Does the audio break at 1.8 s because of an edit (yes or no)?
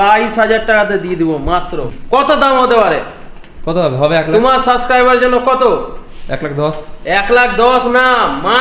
yes